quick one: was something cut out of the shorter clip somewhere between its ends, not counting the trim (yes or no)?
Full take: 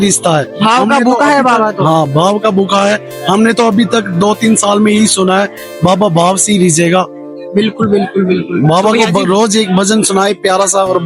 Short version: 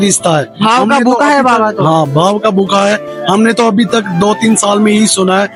no